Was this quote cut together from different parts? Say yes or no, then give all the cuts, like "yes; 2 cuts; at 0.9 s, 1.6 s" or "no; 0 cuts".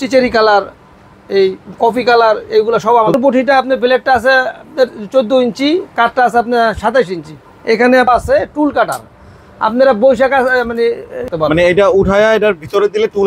yes; 3 cuts; at 3.1 s, 8.1 s, 11.2 s